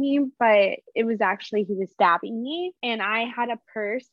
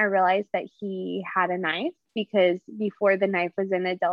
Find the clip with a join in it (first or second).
first